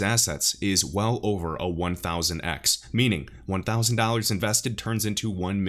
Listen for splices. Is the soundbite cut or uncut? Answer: uncut